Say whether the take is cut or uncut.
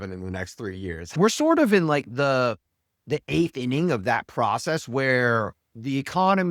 cut